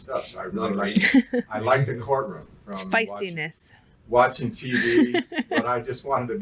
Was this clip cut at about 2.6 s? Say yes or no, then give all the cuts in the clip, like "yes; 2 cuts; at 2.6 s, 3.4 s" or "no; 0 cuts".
yes; 1 cut; at 2.6 s